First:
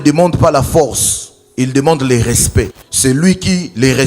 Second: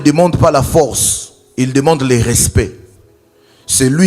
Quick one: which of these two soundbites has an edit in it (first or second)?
first